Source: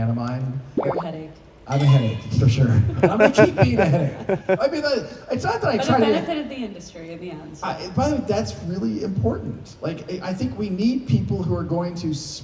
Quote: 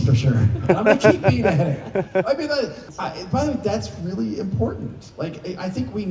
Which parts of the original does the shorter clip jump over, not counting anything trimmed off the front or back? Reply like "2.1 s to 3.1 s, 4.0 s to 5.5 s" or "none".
5.2 s to 7.5 s